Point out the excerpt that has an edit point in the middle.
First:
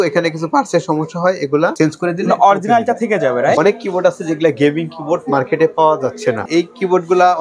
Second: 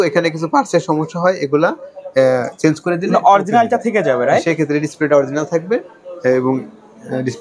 first; 3 cuts; at 1.7 s, 3.6 s, 6.4 s

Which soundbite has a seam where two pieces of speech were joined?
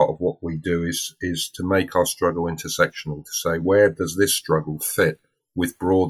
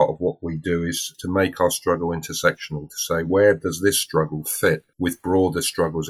second; 2 cuts; at 1.1 s, 4.9 s

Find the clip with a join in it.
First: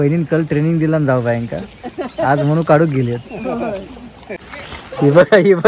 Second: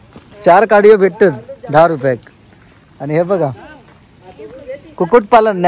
first; 1 cut; at 4.4 s

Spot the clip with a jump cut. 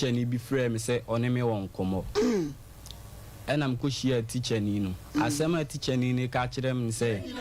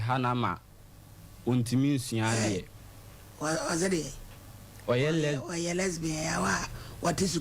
second; 1 cut; at 6.5 s

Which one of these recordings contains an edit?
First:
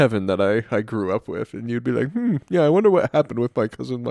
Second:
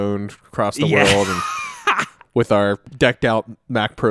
second; 1 cut; at 2.9 s

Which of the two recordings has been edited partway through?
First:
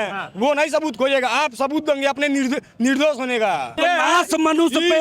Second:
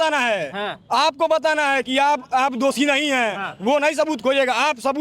first; 1 cut; at 3.8 s

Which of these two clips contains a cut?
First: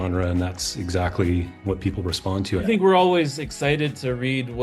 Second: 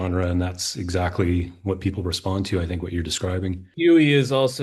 first; 1 cut; at 2.6 s

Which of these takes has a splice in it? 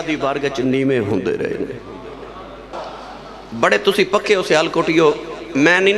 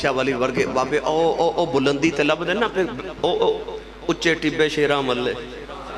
first; 1 cut; at 2.8 s

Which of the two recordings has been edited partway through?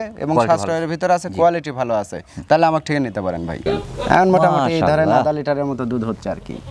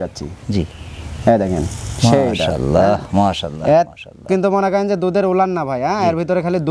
first; 1 cut; at 3.6 s

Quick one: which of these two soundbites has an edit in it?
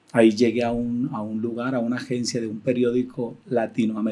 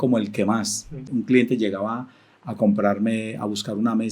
second; 1 cut; at 1.0 s

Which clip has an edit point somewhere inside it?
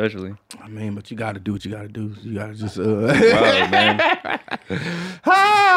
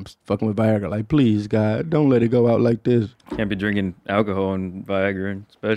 second; 1 cut; at 3.2 s

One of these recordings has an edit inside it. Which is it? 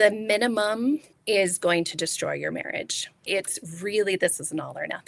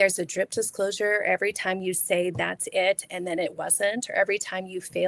first; 2 cuts; at 1.1 s, 3.2 s

